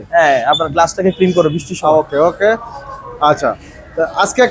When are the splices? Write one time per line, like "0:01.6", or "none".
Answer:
none